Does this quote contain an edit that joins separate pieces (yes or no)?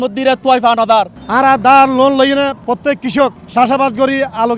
yes